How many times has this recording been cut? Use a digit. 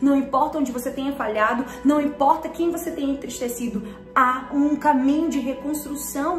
1